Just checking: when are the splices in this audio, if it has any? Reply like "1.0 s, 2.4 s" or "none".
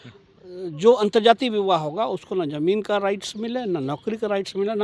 none